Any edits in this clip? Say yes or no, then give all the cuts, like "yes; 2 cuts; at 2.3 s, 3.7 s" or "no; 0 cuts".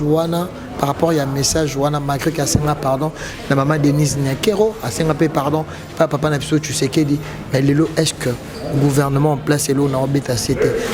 no; 0 cuts